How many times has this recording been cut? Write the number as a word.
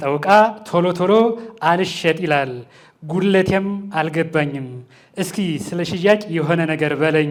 zero